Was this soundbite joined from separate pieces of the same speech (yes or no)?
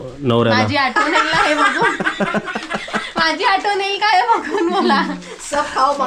no